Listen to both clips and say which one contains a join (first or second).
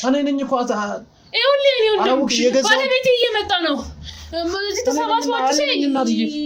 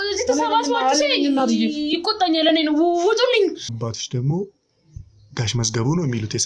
second